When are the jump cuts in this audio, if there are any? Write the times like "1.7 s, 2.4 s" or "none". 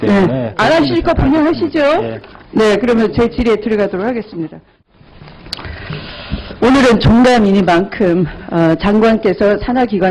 4.2 s